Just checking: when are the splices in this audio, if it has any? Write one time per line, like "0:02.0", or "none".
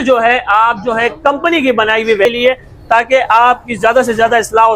0:02.2